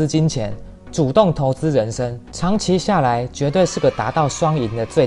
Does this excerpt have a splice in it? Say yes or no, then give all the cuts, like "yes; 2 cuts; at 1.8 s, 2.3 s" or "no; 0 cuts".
yes; 1 cut; at 2.2 s